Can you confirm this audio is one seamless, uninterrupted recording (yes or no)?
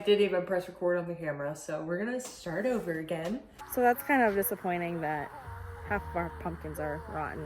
no